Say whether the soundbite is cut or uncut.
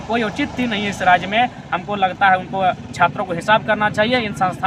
uncut